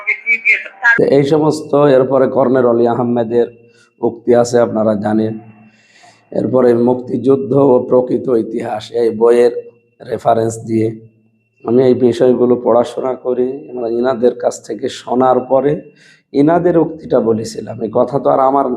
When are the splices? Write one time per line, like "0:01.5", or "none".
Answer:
0:00.9